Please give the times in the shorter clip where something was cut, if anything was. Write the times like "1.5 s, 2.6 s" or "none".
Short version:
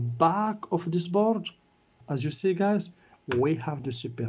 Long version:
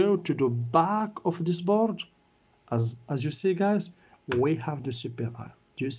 2.0 s